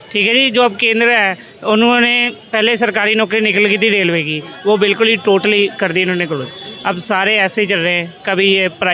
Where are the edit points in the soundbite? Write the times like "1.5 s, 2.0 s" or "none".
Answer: none